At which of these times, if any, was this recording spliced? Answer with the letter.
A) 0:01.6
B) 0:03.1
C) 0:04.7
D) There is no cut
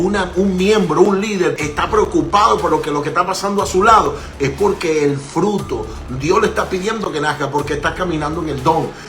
A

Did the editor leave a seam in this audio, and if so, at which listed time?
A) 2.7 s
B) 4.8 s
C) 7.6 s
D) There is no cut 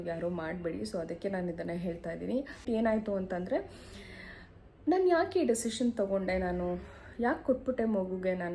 A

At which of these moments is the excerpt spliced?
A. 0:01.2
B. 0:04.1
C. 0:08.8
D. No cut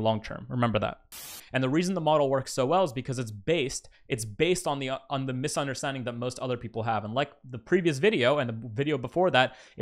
A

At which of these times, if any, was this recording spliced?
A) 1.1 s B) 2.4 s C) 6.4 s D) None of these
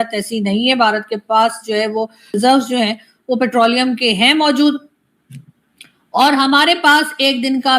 B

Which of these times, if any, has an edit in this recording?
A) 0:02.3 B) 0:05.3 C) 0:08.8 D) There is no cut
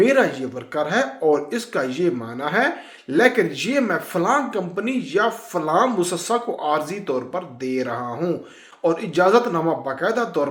D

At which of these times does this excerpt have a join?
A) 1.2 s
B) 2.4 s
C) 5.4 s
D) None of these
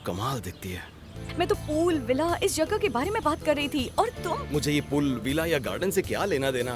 A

